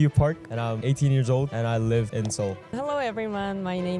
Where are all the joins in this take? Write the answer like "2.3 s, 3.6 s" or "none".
0.8 s, 1.5 s, 2.5 s